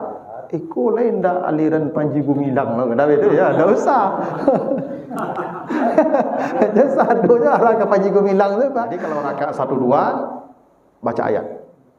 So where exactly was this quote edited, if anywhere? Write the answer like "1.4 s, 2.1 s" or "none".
9.2 s